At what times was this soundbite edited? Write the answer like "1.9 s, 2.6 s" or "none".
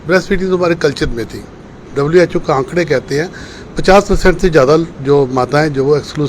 1.8 s